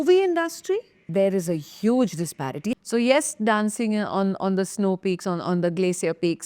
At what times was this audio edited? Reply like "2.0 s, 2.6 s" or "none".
1.0 s, 2.7 s